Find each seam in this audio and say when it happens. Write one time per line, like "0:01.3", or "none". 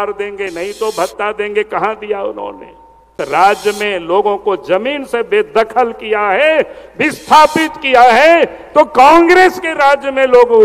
0:03.1